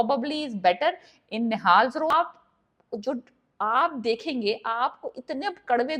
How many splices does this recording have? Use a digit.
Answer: 1